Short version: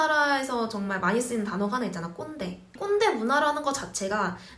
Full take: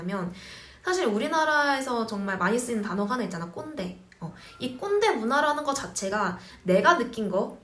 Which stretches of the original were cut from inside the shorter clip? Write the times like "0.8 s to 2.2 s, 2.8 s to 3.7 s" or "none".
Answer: 4.1 s to 4.8 s